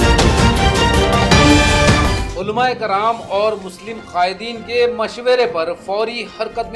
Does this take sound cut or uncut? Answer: cut